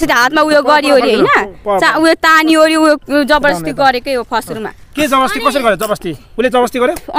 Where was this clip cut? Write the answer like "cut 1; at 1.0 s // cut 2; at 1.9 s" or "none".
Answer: none